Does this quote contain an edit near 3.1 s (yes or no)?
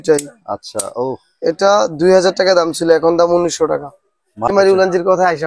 no